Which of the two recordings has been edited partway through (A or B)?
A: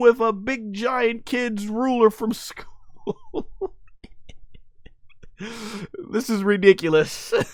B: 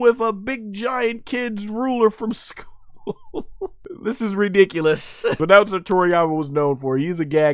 B